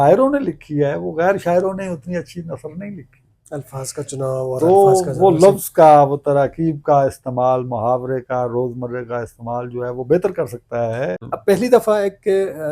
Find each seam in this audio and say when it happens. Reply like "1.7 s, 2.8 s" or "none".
11.3 s

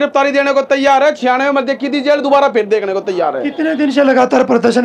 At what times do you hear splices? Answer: none

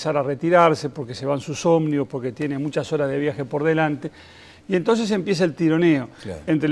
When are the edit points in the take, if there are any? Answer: 1.8 s

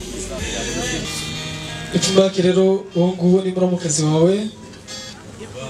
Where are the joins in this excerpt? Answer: 1.0 s

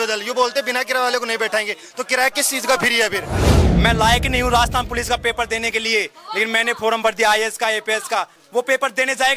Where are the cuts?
3.6 s, 8.4 s

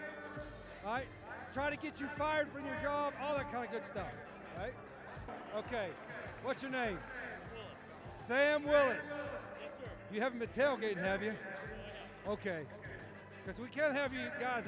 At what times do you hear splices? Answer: none

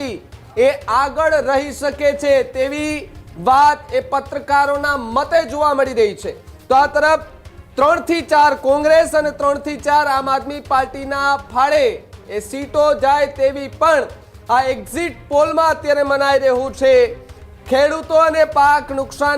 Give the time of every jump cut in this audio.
none

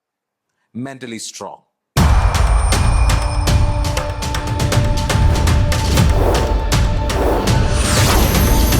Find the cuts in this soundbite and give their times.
1.7 s

